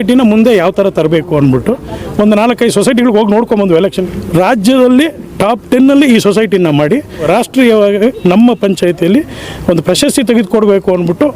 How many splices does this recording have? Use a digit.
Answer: 2